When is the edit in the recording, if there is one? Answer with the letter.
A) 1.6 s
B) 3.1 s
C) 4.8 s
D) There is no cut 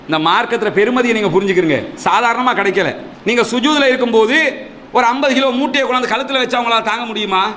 B